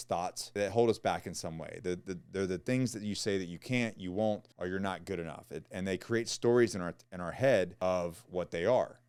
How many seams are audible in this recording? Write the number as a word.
zero